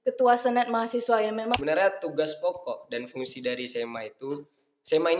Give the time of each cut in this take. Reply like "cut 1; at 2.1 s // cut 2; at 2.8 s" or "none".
cut 1; at 1.6 s